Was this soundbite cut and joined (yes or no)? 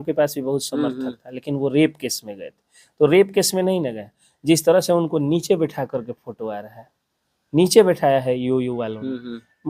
no